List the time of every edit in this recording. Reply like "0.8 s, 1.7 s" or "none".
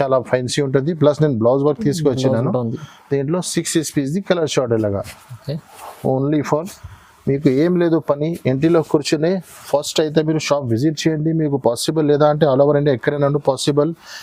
none